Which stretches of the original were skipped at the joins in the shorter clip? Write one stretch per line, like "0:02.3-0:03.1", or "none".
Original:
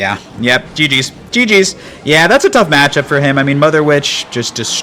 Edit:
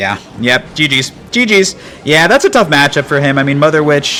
none

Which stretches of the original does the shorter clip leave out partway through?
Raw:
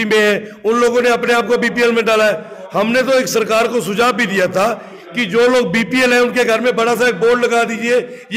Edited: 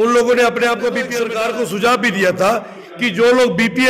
0:01.8-0:03.3

